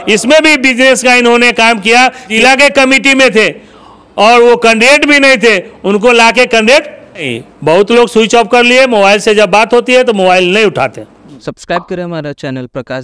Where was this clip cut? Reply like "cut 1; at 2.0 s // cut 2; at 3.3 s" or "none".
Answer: cut 1; at 2.3 s // cut 2; at 7.4 s // cut 3; at 11.3 s